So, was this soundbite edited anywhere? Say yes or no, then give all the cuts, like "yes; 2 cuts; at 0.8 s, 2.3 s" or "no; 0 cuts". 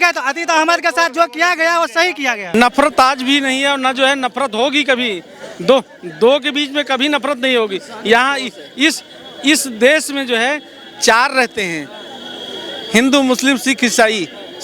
yes; 1 cut; at 2.5 s